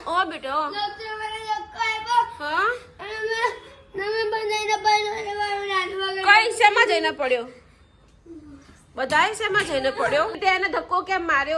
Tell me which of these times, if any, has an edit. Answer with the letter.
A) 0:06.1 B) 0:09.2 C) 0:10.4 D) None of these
C